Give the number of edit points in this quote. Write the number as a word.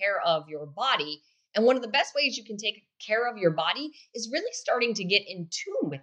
zero